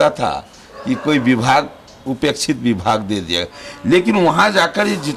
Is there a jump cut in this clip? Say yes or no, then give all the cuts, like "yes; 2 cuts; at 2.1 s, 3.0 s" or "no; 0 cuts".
no; 0 cuts